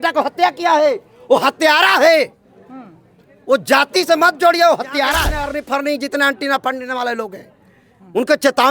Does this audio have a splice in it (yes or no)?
yes